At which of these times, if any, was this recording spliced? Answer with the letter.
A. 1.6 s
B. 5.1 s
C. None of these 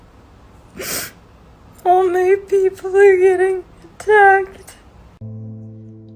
B